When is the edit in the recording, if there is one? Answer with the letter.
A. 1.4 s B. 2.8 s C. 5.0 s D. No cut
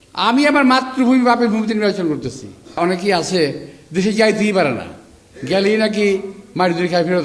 B